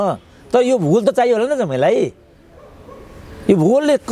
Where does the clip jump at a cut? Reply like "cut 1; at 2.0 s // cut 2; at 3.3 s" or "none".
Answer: none